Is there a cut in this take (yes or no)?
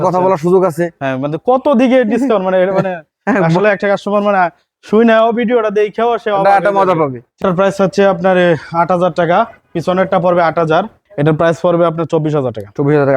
yes